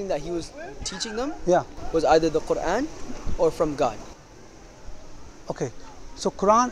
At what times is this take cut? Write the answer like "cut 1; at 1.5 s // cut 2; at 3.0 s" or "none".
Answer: none